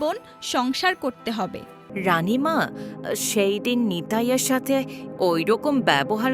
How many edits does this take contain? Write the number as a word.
one